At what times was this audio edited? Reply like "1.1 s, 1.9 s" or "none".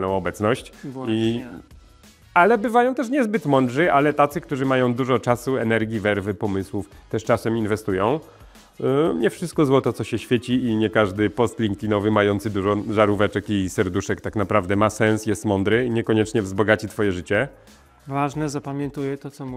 none